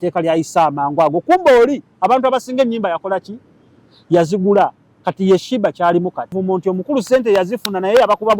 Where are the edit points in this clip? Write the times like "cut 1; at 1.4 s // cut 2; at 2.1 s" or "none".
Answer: cut 1; at 6.3 s